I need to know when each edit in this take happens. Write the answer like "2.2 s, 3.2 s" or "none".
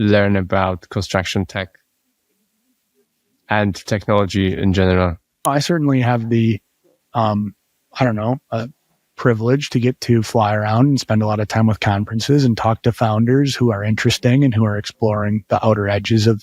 5.5 s

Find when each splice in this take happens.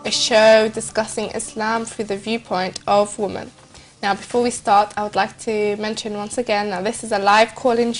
none

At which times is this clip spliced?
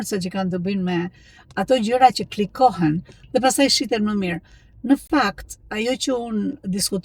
none

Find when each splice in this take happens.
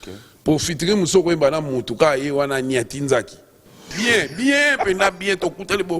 3.9 s

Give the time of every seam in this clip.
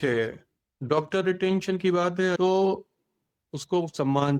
2.4 s

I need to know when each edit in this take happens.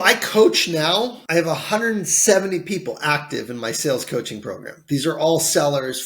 1.2 s

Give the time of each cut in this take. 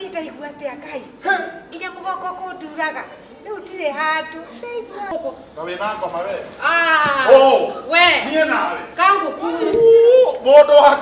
5.0 s

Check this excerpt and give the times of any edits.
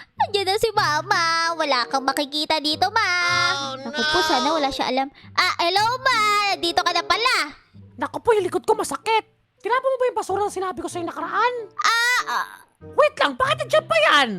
3.6 s

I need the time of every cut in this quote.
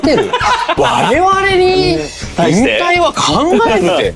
none

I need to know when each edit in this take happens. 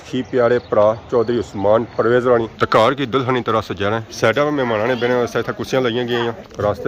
2.5 s, 4.1 s

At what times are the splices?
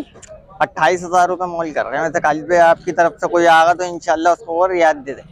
none

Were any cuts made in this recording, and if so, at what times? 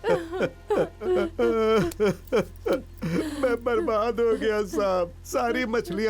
1.0 s

